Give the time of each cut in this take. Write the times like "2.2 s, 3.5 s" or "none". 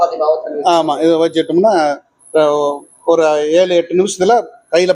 none